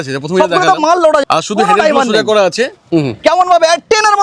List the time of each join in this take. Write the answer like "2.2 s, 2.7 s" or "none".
1.2 s, 2.8 s